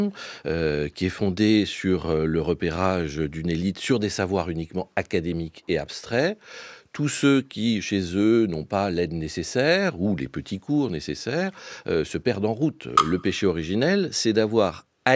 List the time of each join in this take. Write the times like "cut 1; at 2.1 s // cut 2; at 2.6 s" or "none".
cut 1; at 12.9 s